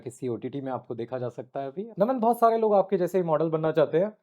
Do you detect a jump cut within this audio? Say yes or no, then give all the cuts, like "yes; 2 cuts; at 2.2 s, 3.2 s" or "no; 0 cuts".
yes; 1 cut; at 1.9 s